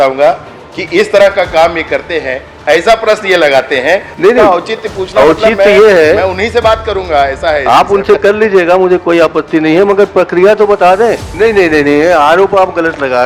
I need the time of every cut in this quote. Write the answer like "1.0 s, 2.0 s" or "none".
4.1 s, 11.3 s